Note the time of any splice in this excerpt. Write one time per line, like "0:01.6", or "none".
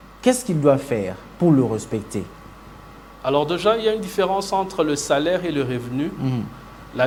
none